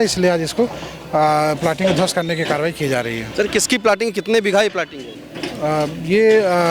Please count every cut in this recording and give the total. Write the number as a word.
zero